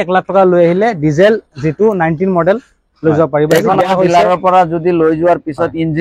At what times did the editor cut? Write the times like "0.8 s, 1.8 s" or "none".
3.8 s